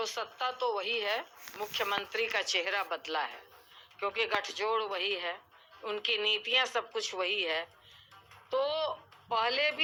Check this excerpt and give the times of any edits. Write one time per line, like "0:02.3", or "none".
none